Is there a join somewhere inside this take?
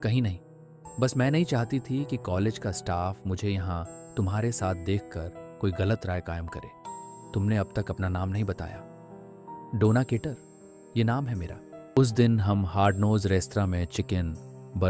yes; 1 cut; at 12.0 s

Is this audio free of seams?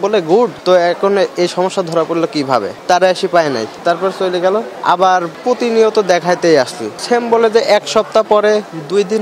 yes; 0 cuts

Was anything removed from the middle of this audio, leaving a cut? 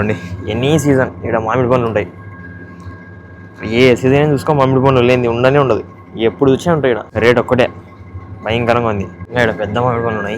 yes; 2 cuts; at 7.1 s, 9.2 s

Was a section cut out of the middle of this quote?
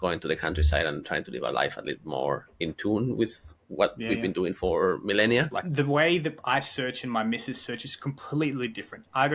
yes; 1 cut; at 5.6 s

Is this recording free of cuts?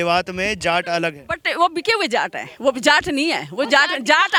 yes; 0 cuts

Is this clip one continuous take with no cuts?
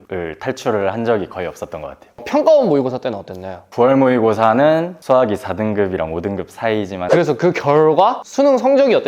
no; 3 cuts; at 3.7 s, 4.9 s, 7.0 s

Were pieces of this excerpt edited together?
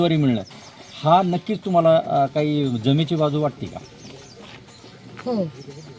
no; 0 cuts

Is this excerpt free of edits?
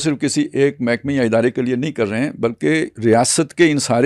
yes; 0 cuts

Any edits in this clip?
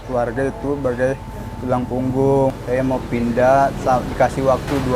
yes; 1 cut; at 2.5 s

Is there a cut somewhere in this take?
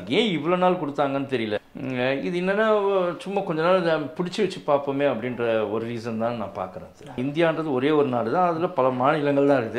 yes; 2 cuts; at 1.6 s, 7.2 s

